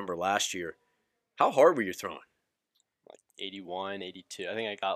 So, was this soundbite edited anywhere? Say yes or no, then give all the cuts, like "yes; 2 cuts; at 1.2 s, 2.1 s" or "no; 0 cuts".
no; 0 cuts